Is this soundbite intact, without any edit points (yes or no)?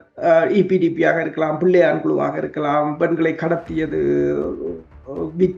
yes